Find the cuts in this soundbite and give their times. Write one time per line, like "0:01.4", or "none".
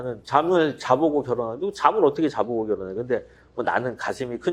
none

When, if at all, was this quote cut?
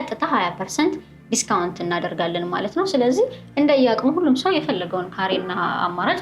none

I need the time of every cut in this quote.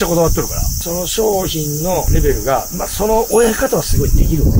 0:00.8
0:02.1

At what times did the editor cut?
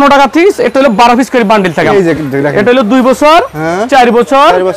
0:01.9

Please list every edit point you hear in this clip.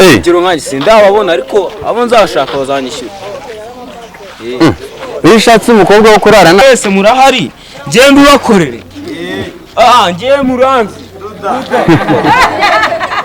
0:06.6

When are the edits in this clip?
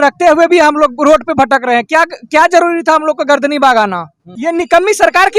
0:04.4

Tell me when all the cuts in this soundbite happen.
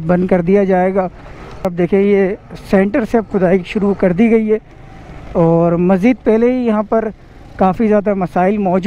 0:01.6

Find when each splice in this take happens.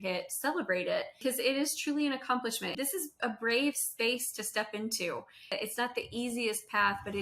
0:01.2
0:02.7
0:05.6

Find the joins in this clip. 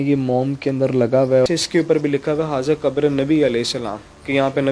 0:01.5

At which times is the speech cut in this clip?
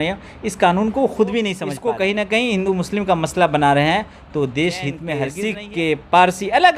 0:01.6
0:05.3

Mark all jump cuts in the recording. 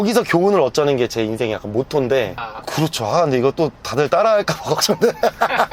0:02.4

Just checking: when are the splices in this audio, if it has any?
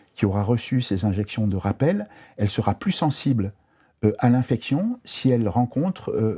none

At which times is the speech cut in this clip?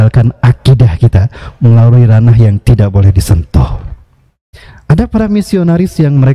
none

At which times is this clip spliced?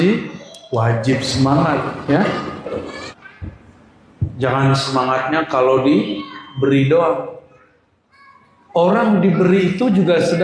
0:03.2

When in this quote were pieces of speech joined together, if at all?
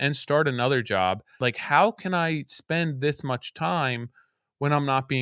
0:01.3

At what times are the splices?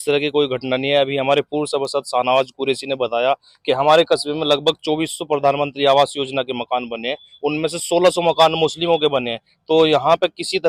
none

